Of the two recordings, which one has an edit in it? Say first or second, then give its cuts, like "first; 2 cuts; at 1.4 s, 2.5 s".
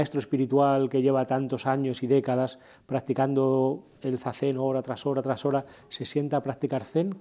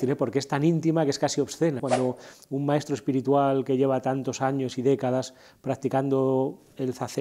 second; 1 cut; at 1.8 s